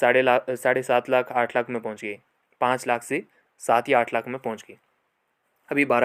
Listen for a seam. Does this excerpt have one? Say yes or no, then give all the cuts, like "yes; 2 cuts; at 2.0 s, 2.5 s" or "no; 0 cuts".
no; 0 cuts